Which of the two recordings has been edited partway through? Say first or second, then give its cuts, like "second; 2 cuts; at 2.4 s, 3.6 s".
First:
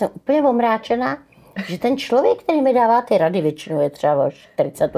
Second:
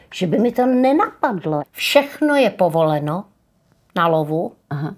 second; 1 cut; at 1.6 s